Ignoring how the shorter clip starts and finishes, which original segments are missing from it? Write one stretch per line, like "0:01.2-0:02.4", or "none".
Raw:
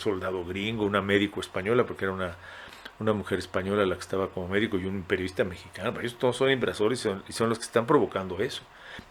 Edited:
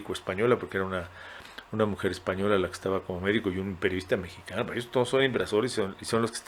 none